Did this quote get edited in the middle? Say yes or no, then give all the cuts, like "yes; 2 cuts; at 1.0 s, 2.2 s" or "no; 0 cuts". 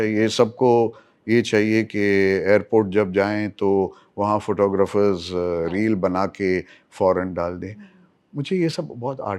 no; 0 cuts